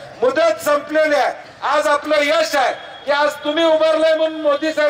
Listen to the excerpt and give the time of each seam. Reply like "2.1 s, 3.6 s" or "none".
1.5 s